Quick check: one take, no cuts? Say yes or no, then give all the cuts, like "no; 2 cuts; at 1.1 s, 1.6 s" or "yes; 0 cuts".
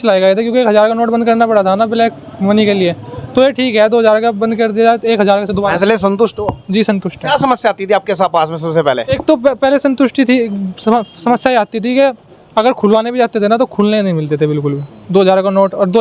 yes; 0 cuts